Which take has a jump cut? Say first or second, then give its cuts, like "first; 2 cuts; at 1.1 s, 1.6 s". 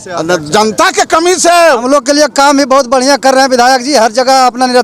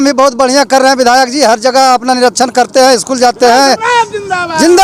first; 1 cut; at 1.6 s